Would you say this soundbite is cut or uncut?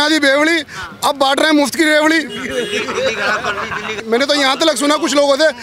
cut